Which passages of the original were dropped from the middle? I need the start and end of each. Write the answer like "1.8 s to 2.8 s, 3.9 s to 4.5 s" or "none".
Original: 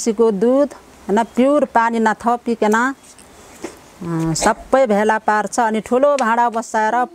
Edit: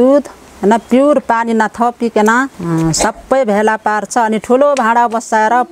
3.0 s to 4.0 s